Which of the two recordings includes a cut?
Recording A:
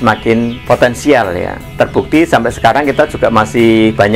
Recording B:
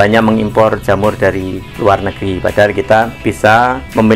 B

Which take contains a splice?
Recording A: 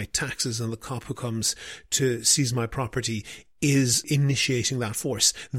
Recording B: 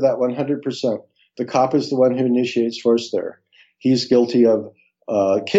A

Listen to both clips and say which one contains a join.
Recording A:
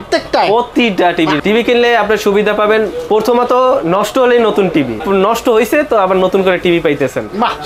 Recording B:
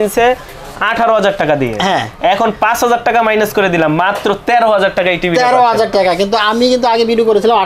A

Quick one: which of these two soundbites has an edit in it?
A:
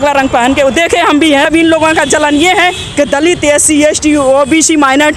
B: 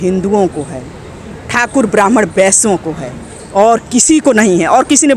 A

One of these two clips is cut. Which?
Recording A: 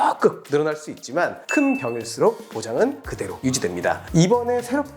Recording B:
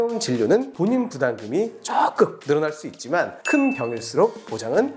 A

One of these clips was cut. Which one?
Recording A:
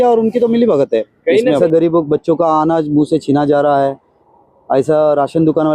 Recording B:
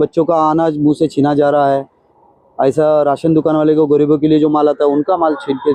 A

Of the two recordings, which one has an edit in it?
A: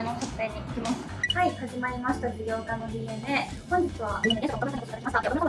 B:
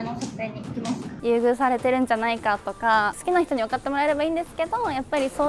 B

